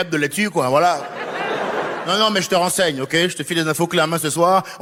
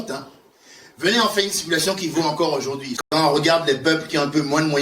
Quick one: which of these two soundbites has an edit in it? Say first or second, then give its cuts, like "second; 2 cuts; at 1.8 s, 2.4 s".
second; 1 cut; at 3.0 s